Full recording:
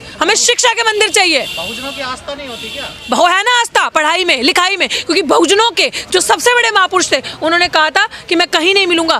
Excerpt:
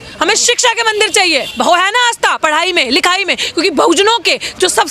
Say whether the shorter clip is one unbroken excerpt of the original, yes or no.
no